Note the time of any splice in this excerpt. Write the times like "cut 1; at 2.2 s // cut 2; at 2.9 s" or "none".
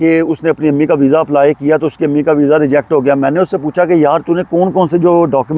none